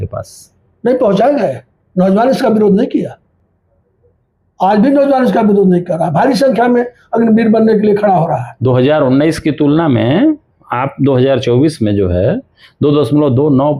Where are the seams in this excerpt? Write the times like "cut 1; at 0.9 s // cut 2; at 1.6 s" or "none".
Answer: none